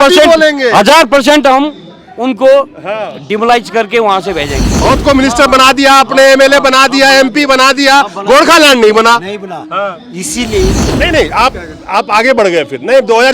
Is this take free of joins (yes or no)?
no